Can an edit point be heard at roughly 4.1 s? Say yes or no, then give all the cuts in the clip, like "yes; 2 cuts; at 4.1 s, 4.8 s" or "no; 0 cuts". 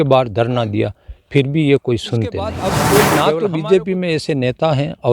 no; 1 cut; at 2.7 s